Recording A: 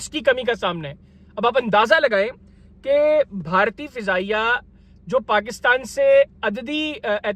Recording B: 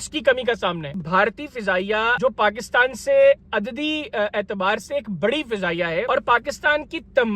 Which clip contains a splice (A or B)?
B